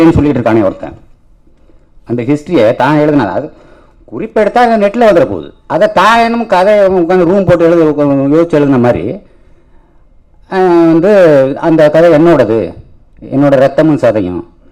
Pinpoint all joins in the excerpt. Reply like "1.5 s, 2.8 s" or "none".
none